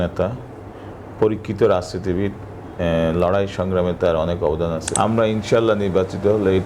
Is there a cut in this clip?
yes; 1 cut; at 4.9 s

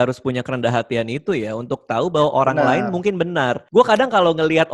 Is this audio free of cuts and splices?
no; 1 cut; at 3.6 s

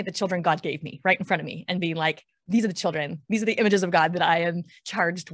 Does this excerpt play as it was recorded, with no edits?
yes; 0 cuts

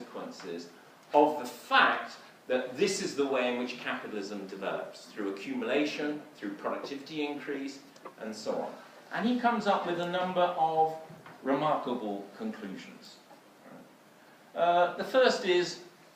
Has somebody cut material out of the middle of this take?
no; 0 cuts

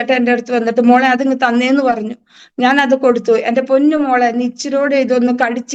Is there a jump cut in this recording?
no; 0 cuts

